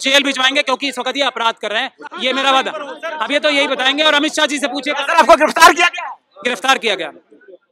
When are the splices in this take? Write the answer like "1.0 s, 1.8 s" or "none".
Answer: none